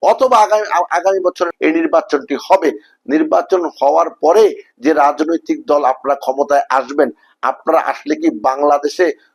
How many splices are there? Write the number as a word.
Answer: two